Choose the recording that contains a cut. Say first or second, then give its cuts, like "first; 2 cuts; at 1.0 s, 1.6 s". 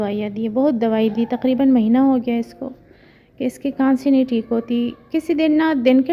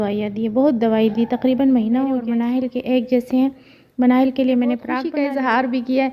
second; 2 cuts; at 2.3 s, 5.0 s